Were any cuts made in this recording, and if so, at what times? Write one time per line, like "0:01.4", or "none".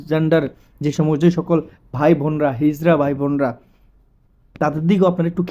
none